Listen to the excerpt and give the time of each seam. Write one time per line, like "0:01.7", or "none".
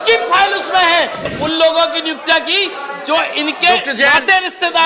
0:01.3

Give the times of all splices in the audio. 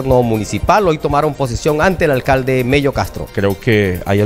0:03.2

